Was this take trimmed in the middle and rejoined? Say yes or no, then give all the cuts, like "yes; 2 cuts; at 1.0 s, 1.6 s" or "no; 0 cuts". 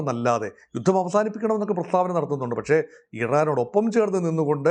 no; 0 cuts